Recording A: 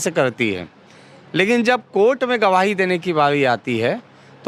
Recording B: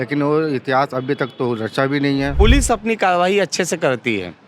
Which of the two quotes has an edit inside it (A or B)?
B